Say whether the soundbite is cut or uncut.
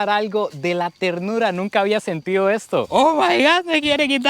cut